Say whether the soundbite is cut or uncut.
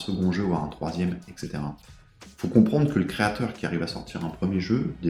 uncut